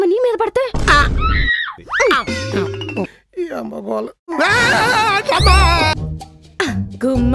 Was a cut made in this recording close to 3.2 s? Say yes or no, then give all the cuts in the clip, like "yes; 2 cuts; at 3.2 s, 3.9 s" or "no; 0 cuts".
yes; 2 cuts; at 3.2 s, 5.9 s